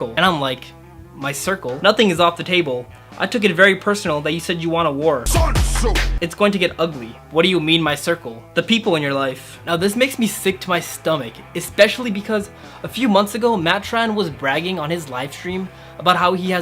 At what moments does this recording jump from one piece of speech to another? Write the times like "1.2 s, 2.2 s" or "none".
none